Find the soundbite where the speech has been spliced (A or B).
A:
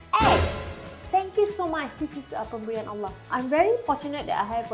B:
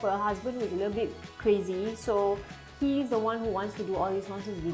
A